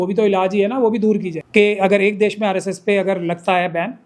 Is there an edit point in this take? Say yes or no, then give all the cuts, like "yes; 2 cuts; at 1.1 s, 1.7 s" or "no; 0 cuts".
yes; 1 cut; at 1.3 s